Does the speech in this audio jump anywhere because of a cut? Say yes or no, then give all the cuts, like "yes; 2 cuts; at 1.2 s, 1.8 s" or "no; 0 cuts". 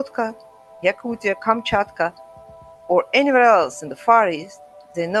no; 0 cuts